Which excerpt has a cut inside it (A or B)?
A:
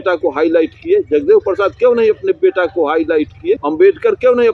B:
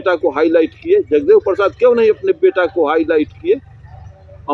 A